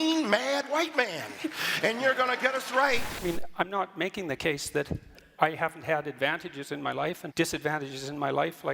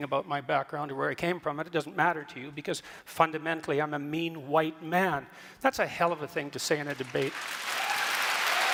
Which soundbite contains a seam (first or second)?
first